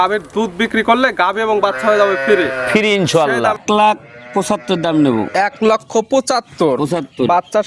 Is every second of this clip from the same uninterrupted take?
no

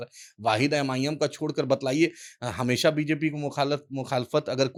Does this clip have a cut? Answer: no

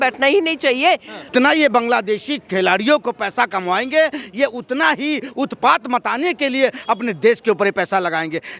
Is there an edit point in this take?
yes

